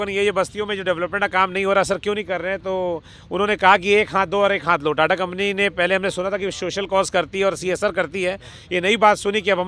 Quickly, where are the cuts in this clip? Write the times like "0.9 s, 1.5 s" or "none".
none